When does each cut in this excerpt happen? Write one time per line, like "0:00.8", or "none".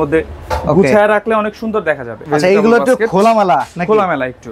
0:02.1